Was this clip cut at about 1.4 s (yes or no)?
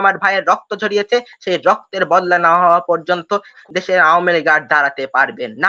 no